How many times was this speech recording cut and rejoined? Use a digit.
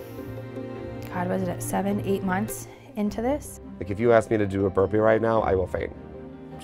1